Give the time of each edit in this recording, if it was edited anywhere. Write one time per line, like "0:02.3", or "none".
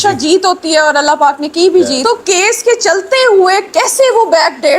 0:02.0